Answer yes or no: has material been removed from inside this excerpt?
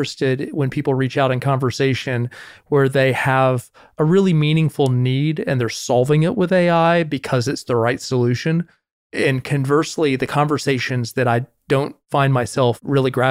no